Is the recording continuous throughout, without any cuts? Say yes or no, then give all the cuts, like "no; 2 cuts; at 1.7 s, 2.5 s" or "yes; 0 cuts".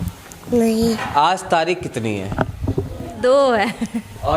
no; 2 cuts; at 1.0 s, 3.1 s